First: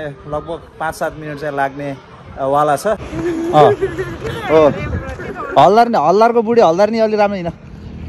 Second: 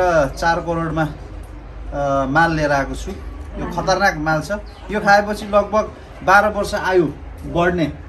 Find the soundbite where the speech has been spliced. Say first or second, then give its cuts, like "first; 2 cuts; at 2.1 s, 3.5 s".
first; 1 cut; at 3.0 s